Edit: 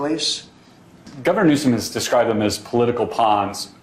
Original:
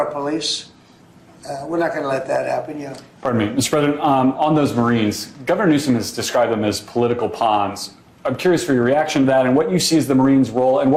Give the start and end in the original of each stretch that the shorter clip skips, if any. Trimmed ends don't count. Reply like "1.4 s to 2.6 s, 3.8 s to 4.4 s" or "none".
1.3 s to 5.3 s